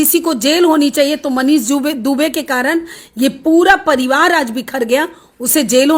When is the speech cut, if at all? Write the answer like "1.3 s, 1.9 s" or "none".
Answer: none